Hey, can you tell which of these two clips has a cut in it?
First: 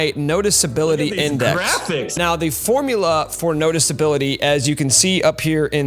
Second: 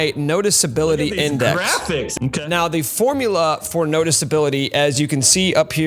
first; 1 cut; at 2.1 s

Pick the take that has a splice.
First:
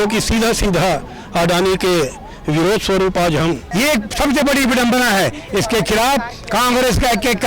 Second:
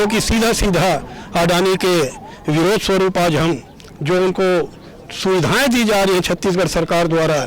first; 1 cut; at 3.6 s

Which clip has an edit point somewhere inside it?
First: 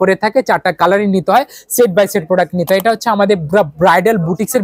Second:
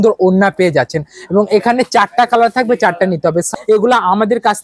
second; 1 cut; at 3.5 s

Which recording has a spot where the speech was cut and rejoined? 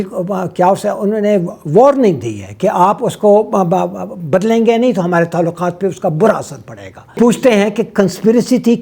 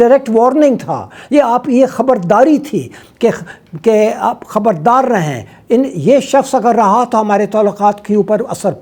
first; 1 cut; at 7.1 s

